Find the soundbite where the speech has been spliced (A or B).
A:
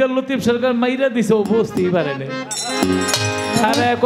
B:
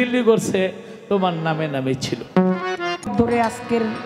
B